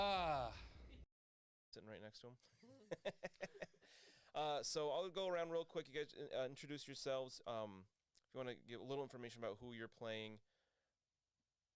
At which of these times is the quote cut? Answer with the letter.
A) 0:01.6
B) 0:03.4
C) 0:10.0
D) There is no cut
A